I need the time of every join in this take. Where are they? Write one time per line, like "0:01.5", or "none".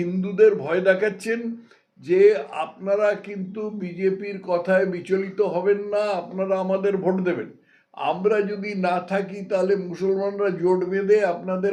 none